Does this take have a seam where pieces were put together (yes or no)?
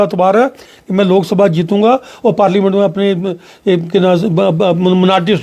no